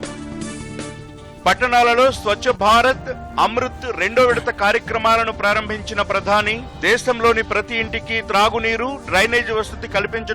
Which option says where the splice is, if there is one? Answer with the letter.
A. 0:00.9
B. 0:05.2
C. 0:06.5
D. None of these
A